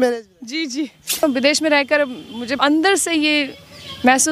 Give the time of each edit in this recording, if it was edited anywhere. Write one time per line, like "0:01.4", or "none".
0:01.2
0:02.6